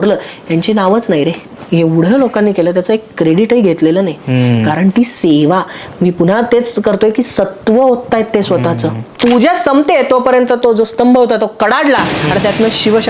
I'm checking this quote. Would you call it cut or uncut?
cut